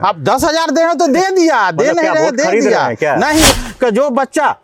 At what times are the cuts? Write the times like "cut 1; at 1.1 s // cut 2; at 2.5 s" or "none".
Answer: cut 1; at 3.5 s